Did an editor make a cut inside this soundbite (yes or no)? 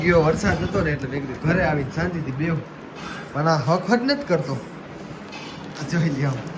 no